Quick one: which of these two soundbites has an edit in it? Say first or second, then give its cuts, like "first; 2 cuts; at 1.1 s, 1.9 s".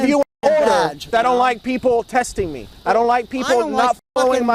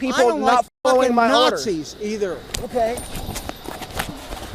first; 1 cut; at 1.1 s